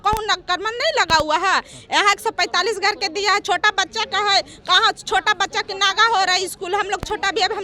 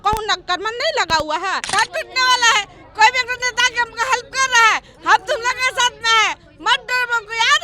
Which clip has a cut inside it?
second; 1 cut; at 1.7 s

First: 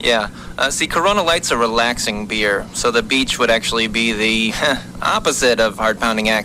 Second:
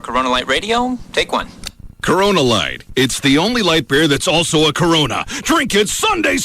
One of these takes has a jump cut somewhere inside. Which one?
second; 1 cut; at 1.6 s

